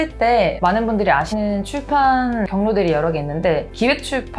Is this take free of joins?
no; 2 cuts; at 1.3 s, 2.5 s

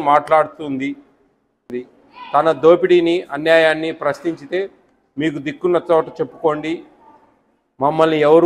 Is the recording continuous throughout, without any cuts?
no; 1 cut; at 1.6 s

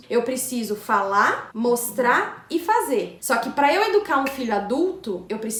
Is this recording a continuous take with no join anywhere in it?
yes; 0 cuts

